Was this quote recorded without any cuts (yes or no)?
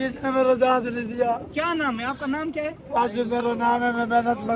yes